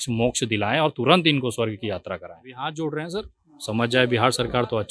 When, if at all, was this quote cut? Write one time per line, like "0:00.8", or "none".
0:02.5